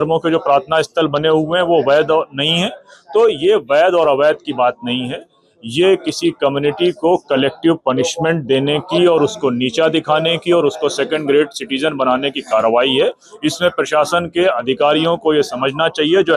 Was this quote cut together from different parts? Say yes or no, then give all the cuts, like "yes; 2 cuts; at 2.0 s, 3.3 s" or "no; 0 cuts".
no; 0 cuts